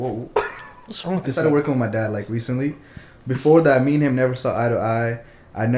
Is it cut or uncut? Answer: cut